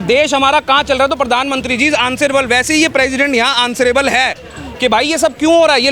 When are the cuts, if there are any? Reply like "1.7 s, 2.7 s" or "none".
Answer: none